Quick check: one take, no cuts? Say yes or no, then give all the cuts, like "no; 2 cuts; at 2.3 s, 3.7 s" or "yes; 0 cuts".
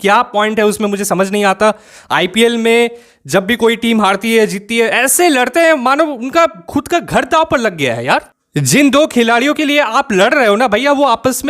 no; 1 cut; at 8.4 s